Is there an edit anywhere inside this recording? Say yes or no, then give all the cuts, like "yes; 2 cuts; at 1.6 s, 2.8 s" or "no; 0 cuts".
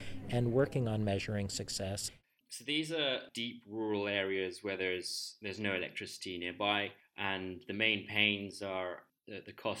yes; 1 cut; at 2.0 s